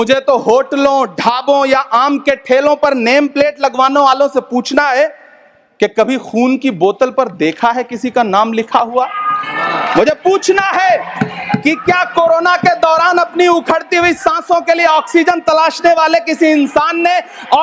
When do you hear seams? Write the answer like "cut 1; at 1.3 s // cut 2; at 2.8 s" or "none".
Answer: none